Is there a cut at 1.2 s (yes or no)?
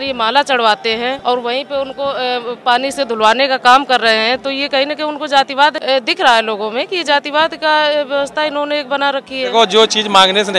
yes